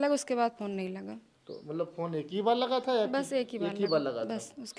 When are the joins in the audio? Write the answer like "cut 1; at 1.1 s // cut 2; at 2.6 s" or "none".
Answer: none

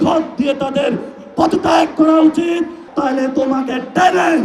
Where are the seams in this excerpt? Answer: cut 1; at 2.8 s

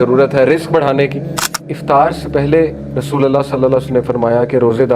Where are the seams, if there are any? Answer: cut 1; at 1.6 s

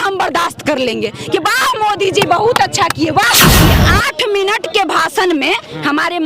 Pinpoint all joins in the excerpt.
cut 1; at 3.7 s

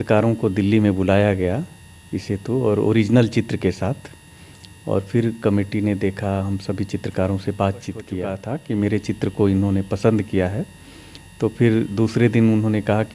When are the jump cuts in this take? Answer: cut 1; at 8.3 s

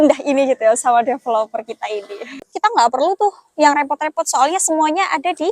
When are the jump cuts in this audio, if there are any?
cut 1; at 2.3 s

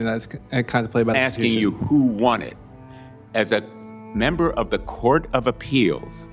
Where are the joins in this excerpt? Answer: cut 1; at 1.1 s

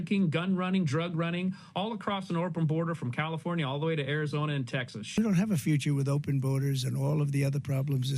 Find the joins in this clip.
cut 1; at 5.2 s

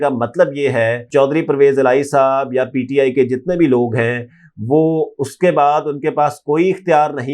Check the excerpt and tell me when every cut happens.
cut 1; at 1.0 s

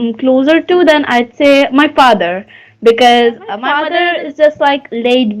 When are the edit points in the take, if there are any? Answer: cut 1; at 3.7 s

